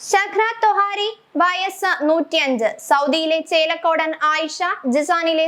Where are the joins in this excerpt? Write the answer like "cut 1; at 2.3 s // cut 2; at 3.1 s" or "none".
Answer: none